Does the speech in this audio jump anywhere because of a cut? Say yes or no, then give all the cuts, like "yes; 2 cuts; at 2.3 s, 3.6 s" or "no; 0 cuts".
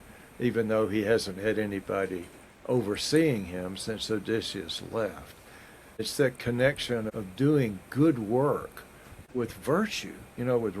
yes; 3 cuts; at 6.0 s, 7.2 s, 9.2 s